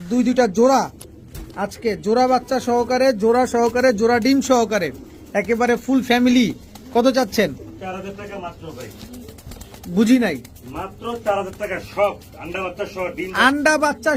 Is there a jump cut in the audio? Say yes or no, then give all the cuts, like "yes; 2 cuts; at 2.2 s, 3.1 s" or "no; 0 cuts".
no; 0 cuts